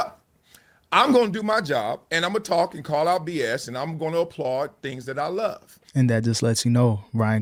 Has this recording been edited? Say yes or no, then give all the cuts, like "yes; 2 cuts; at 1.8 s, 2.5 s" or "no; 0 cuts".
no; 0 cuts